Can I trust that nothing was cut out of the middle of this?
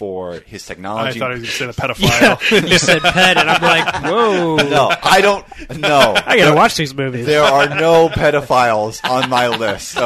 yes; 0 cuts

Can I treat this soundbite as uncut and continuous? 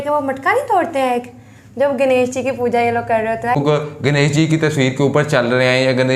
no; 1 cut; at 3.6 s

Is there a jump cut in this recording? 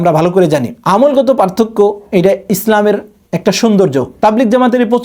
yes; 1 cut; at 4.1 s

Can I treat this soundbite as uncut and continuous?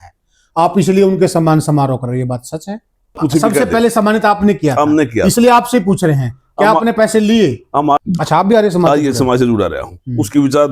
no; 2 cuts; at 3.2 s, 8.0 s

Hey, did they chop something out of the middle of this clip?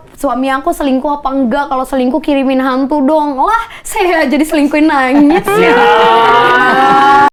no; 0 cuts

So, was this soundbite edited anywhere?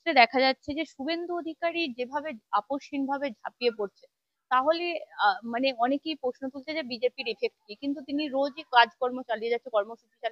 no; 0 cuts

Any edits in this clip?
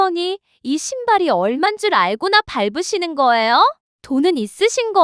yes; 1 cut; at 3.9 s

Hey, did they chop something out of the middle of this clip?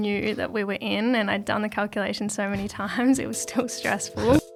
no; 0 cuts

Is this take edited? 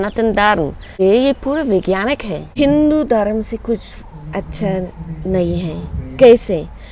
yes; 2 cuts; at 0.9 s, 2.4 s

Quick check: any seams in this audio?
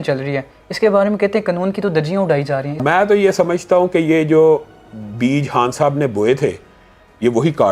yes; 1 cut; at 2.7 s

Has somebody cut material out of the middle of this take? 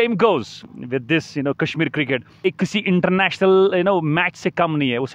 yes; 1 cut; at 2.4 s

